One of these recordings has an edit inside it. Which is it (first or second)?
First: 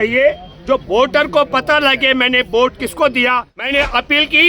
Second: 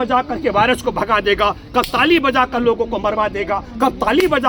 first